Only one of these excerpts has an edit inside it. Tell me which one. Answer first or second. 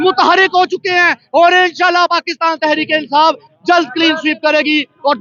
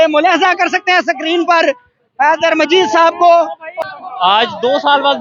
second